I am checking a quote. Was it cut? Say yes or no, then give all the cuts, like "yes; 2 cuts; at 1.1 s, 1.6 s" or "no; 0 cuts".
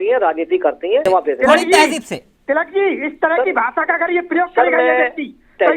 yes; 1 cut; at 1.0 s